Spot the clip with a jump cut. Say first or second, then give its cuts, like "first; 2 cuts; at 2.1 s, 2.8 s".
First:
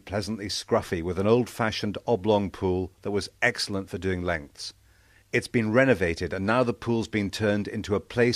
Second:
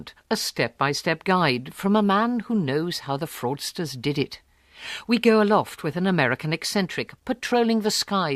first; 1 cut; at 1.5 s